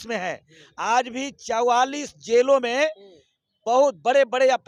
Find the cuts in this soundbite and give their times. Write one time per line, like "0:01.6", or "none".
none